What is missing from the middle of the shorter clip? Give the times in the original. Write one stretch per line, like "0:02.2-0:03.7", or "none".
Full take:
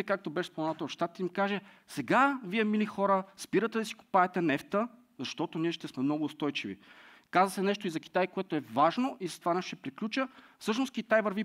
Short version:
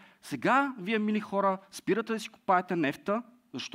none